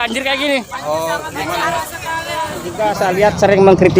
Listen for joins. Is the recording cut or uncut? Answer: cut